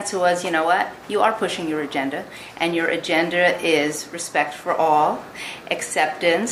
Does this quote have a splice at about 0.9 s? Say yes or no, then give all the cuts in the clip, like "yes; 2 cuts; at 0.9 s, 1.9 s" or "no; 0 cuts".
no; 0 cuts